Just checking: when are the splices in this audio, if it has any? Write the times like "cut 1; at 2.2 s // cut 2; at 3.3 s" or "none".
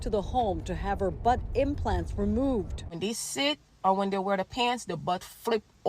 cut 1; at 2.9 s